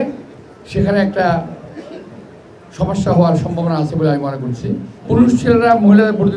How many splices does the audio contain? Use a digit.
1